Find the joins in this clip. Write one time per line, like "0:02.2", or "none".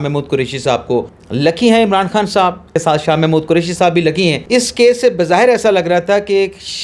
0:01.2
0:02.7
0:04.4